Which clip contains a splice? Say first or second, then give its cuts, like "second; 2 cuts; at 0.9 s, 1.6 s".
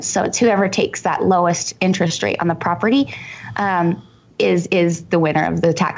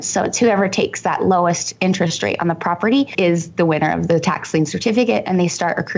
second; 1 cut; at 3.1 s